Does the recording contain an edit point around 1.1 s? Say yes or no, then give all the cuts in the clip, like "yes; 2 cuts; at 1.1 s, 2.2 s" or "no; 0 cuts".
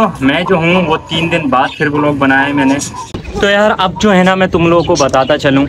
no; 1 cut; at 3.0 s